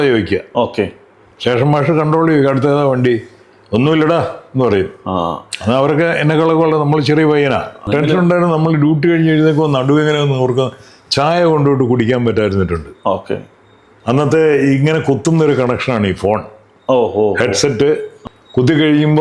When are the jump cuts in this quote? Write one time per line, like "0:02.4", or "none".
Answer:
0:07.8
0:18.1

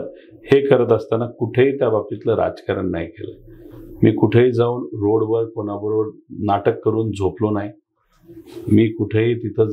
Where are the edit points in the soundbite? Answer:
none

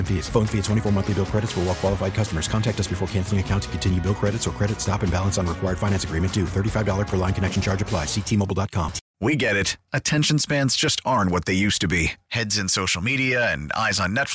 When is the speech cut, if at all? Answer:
0:09.0

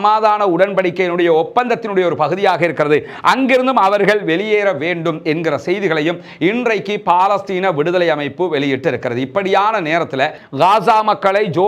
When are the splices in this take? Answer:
0:10.4

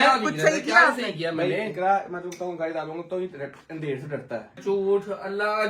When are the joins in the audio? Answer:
0:04.5

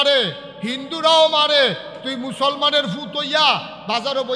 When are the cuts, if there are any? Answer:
none

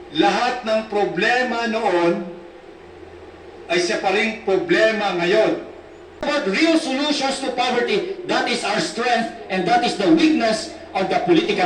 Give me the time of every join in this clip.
0:06.3

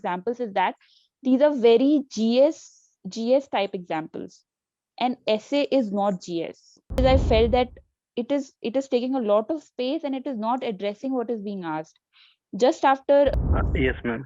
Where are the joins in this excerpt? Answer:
0:07.0
0:13.3

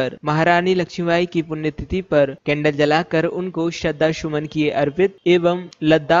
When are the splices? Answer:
none

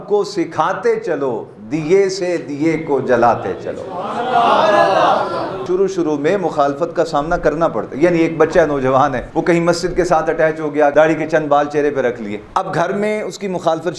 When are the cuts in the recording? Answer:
0:05.6
0:09.2
0:10.9

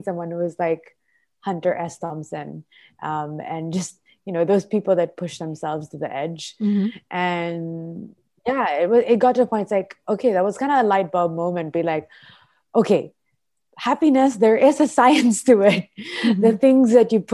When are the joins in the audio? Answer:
none

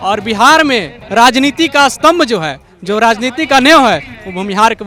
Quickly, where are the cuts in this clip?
none

